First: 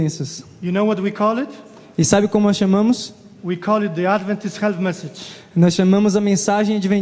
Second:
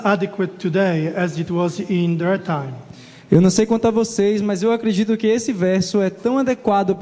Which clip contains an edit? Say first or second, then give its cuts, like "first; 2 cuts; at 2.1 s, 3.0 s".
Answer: second; 1 cut; at 3.8 s